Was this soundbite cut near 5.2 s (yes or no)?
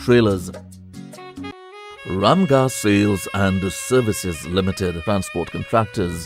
no